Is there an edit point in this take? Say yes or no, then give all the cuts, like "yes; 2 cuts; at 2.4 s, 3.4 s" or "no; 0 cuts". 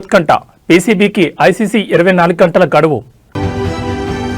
yes; 1 cut; at 3.3 s